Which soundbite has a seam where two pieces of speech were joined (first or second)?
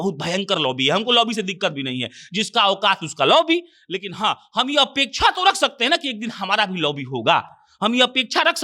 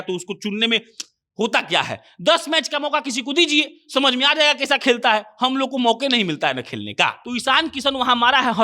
second